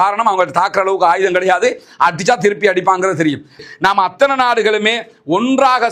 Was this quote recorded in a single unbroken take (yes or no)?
no